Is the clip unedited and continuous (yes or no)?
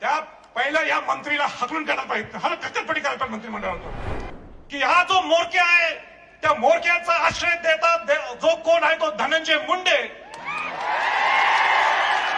no